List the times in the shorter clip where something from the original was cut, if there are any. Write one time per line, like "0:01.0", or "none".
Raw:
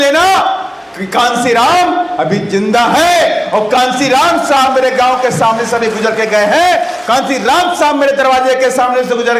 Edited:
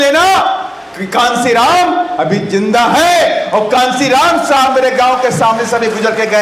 none